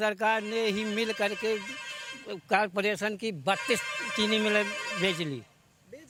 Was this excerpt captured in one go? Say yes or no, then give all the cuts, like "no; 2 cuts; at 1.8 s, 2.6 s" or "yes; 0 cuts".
yes; 0 cuts